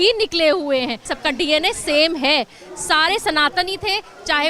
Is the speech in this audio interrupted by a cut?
yes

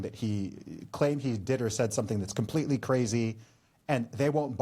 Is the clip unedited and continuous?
yes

